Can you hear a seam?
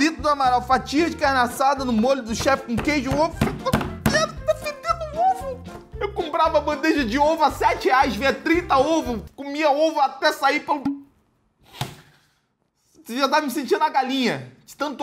no; 0 cuts

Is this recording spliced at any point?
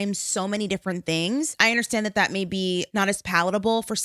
yes; 2 cuts; at 1.5 s, 3.0 s

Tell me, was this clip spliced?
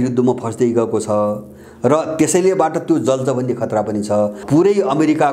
yes; 1 cut; at 4.4 s

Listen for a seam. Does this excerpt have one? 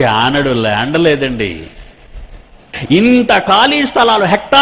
yes; 1 cut; at 2.7 s

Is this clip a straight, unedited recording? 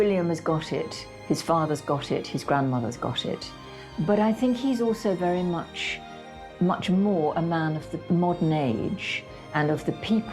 no; 2 cuts; at 3.6 s, 8.0 s

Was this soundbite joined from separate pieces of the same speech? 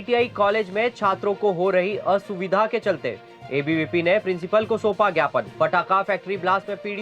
no; 0 cuts

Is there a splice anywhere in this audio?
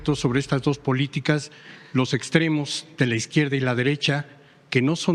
no; 0 cuts

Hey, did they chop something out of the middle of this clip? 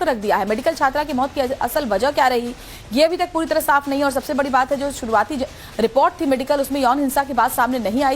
yes; 1 cut; at 5.6 s

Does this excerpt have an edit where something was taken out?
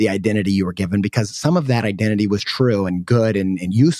yes; 1 cut; at 3.1 s

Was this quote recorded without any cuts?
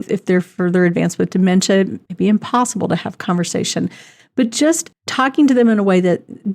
no; 1 cut; at 2.0 s

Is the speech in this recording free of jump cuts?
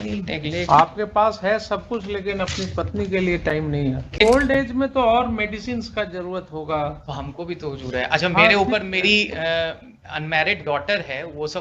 no; 1 cut; at 4.2 s

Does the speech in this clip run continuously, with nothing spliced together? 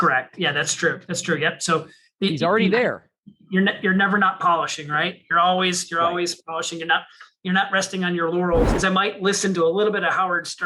no; 1 cut; at 8.7 s

